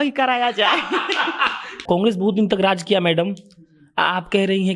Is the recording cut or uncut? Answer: cut